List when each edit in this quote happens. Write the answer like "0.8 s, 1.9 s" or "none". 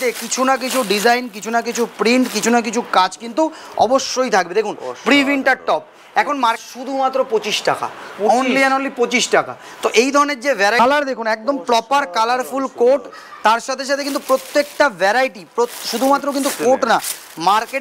6.6 s, 10.8 s